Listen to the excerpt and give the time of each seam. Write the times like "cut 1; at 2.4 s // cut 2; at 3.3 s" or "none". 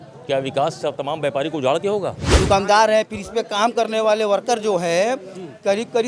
cut 1; at 2.2 s